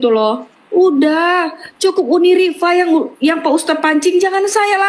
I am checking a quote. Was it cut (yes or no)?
no